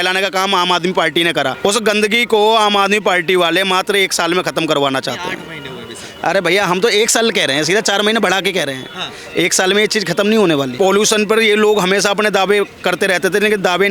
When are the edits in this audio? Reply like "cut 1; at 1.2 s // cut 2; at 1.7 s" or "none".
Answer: cut 1; at 1.6 s // cut 2; at 10.7 s